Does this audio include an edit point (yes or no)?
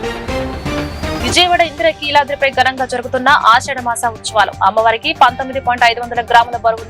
yes